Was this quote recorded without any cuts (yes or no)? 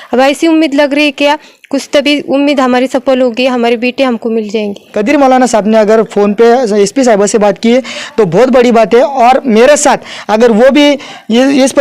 no